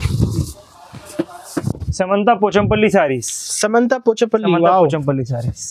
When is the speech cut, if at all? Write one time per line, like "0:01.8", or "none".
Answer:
0:01.6